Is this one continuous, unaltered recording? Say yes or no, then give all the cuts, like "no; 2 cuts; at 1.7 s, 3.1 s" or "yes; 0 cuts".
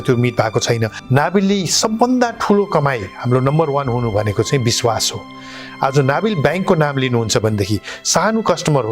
no; 1 cut; at 0.9 s